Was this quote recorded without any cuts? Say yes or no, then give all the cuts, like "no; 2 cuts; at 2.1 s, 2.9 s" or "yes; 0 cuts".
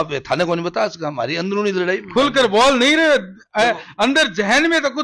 yes; 0 cuts